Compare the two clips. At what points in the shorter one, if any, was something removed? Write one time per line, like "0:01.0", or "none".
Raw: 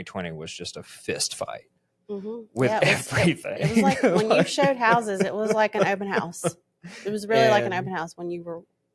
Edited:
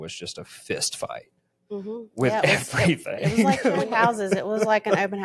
0:03.8